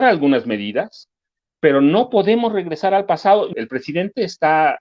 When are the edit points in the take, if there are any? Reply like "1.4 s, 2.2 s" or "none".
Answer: 3.5 s